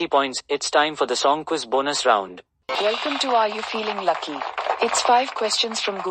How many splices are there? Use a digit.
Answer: 1